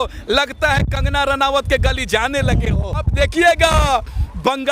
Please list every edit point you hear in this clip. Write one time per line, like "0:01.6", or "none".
0:03.1